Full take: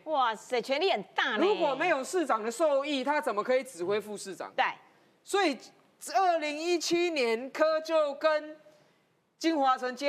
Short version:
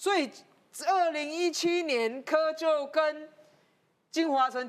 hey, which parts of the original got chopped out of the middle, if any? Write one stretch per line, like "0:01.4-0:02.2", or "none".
none